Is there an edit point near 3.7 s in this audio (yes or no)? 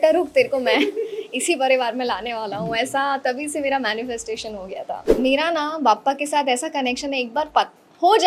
no